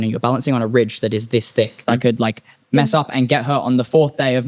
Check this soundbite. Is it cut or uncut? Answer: cut